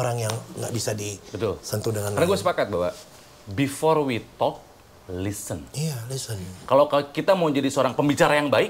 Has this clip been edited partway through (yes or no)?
no